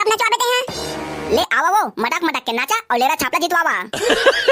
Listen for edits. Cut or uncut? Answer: uncut